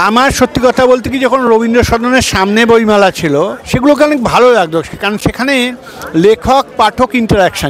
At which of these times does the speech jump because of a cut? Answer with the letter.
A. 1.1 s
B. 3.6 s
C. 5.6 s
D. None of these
B